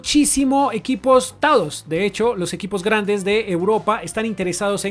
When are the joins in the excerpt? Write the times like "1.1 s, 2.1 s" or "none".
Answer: none